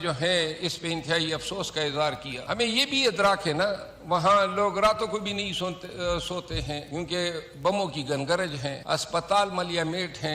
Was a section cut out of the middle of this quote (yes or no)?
yes